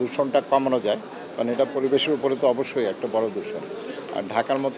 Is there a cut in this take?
no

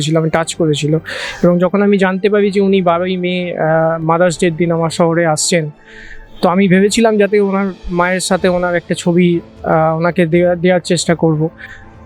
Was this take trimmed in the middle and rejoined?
no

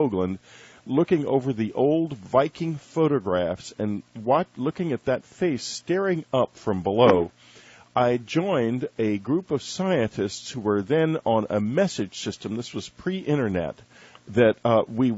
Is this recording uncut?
no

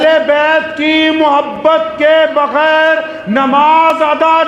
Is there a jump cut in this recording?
no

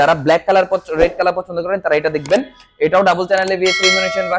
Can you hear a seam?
no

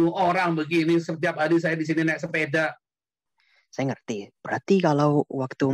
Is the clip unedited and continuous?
no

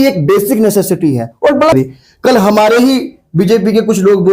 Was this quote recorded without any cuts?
no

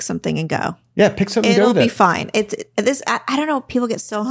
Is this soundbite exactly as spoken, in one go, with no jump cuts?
yes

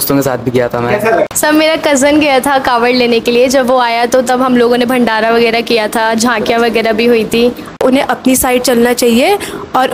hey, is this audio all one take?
no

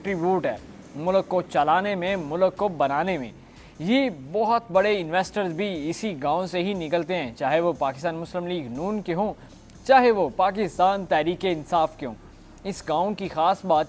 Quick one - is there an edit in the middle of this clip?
no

